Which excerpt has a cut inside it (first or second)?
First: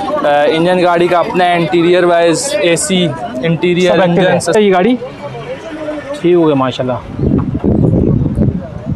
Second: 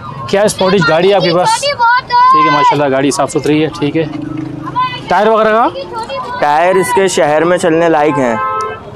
first